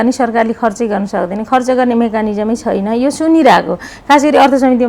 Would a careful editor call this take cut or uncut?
uncut